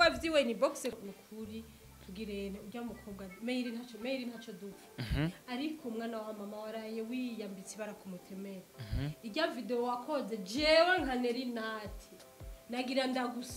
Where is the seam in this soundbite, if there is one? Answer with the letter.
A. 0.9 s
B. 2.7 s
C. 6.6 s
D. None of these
A